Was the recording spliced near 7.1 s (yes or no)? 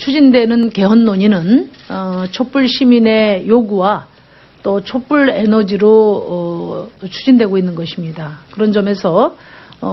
yes